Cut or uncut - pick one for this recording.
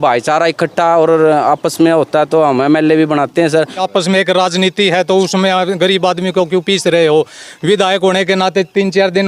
cut